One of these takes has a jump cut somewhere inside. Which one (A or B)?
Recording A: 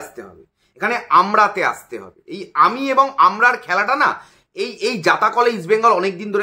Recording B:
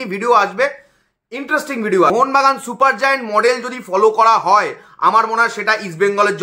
B